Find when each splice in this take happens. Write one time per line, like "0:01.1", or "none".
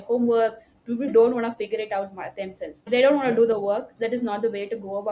0:01.1
0:02.9
0:03.9

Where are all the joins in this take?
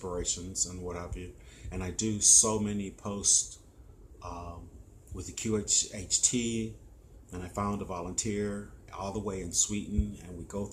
none

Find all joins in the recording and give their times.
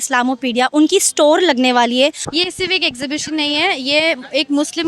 0:02.2

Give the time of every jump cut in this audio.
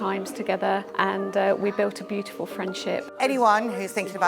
0:00.9
0:03.1

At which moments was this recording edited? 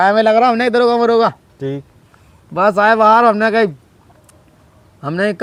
none

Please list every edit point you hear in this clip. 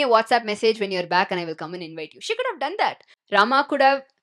0:03.1

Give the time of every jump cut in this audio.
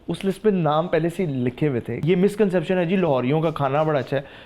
0:02.0

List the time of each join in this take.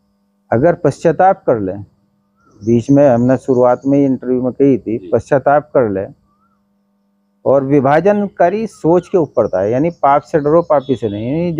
none

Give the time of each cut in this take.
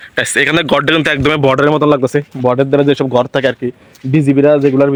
none

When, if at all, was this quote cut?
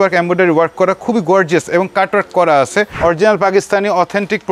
0:03.0

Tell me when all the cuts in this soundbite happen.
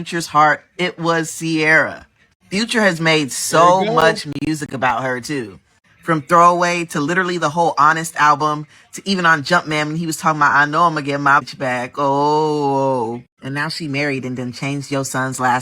0:11.5

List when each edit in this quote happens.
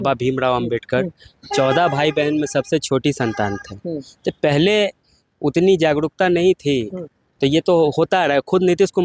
none

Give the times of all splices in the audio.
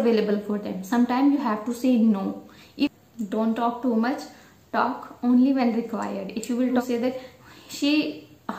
0:02.9
0:06.7

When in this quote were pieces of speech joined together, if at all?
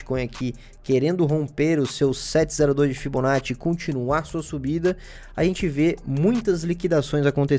none

